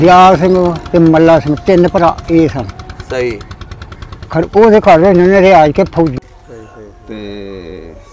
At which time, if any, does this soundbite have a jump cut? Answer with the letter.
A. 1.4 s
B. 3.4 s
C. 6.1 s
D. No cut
C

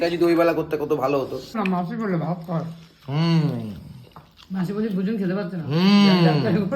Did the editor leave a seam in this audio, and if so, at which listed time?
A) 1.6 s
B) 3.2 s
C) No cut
A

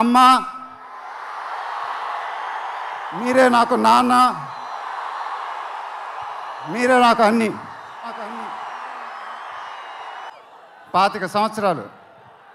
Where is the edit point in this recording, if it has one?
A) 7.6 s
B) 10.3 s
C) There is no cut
B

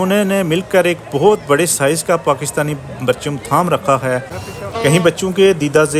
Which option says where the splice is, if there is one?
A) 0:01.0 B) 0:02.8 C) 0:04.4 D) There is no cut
C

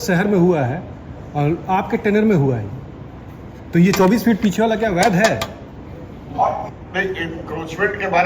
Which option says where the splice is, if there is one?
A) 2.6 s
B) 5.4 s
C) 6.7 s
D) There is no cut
C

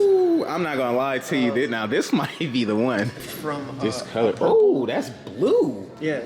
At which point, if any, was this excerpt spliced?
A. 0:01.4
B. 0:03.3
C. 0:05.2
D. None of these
B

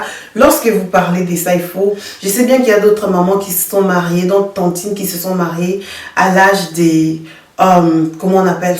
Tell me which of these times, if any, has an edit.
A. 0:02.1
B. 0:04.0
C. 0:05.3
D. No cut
A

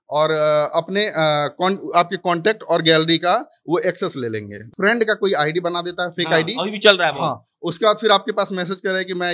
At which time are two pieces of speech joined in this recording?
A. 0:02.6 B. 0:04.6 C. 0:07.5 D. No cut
B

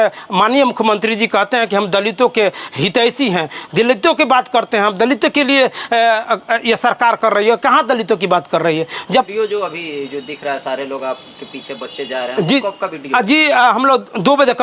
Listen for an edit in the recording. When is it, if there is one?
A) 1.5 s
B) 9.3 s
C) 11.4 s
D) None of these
B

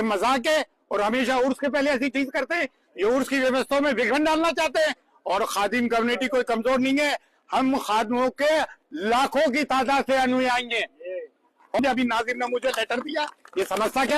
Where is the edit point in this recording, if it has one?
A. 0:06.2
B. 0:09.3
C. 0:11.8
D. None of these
C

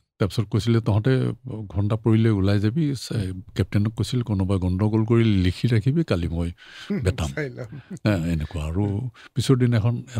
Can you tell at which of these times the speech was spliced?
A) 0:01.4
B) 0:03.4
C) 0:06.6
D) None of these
D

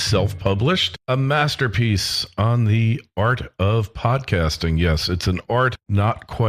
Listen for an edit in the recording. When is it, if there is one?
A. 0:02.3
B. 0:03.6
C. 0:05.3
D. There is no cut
C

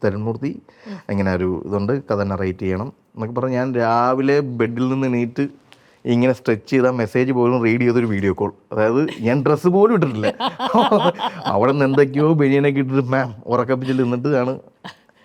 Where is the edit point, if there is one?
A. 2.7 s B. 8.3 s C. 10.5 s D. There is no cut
D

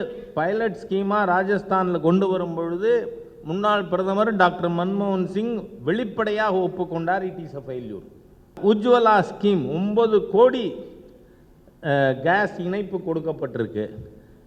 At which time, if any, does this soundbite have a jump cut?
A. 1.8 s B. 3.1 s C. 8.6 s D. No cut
C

